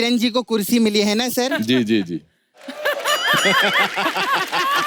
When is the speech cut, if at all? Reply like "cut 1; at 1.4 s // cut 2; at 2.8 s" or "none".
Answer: none